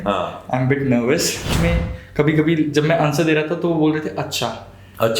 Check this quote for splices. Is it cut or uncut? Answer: cut